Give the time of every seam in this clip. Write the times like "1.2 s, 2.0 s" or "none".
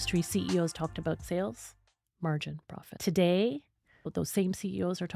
1.2 s, 2.8 s, 4.1 s